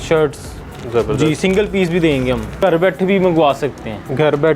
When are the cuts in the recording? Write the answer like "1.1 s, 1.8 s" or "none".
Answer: 2.5 s

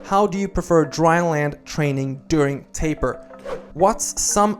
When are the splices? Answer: 3.3 s

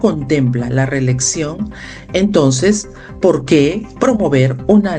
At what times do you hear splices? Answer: none

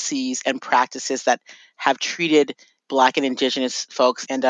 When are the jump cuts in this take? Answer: 2.8 s

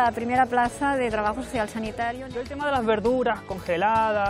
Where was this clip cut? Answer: 2.5 s

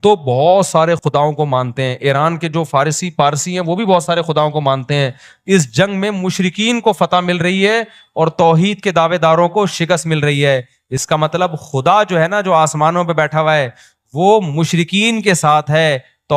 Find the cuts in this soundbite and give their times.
none

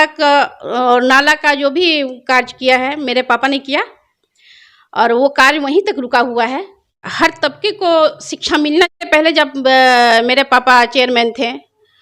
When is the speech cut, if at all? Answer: 7.1 s, 9.0 s

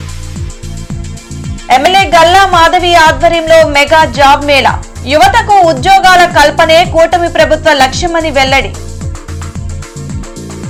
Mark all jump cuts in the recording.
none

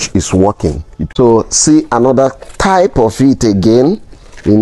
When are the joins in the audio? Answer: 0.9 s

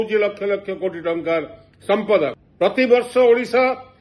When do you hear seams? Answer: 2.8 s

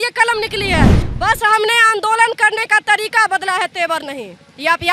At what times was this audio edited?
1.0 s

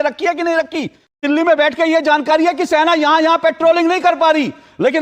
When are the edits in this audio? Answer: 1.2 s

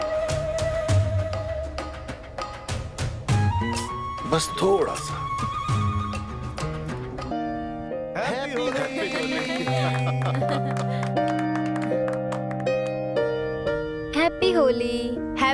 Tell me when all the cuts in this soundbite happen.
7.3 s

